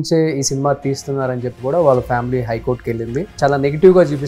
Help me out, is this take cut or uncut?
cut